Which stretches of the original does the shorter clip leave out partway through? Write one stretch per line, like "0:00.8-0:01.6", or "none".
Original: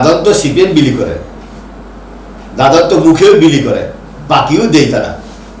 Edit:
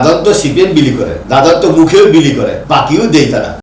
0:01.2-0:02.5
0:03.9-0:04.2